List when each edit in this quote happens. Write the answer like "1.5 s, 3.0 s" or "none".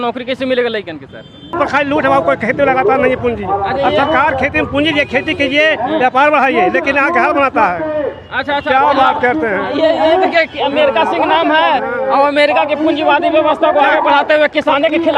1.6 s